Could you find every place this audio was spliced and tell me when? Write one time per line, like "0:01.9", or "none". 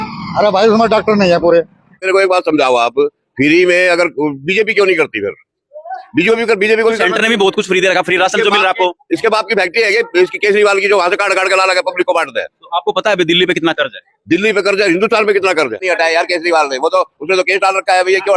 0:02.1
0:15.8